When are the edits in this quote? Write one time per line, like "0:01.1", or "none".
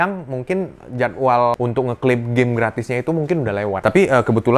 0:01.5
0:03.8